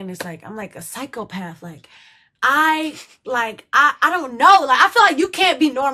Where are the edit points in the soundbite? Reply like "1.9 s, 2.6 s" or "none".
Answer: none